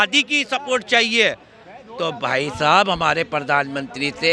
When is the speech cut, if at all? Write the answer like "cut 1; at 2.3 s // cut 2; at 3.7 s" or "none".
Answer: none